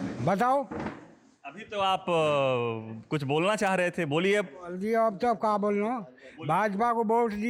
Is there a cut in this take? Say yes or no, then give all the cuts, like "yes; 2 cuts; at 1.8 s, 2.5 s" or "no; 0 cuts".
no; 0 cuts